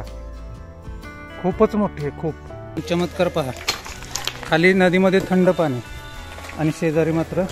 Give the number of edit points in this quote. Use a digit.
1